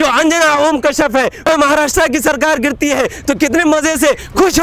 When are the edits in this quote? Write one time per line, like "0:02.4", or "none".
0:01.5